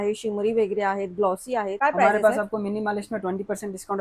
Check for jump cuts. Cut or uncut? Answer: cut